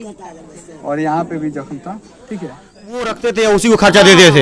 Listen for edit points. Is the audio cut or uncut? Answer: cut